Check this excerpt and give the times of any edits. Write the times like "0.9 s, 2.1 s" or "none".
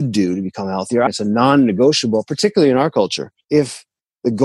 1.1 s, 3.3 s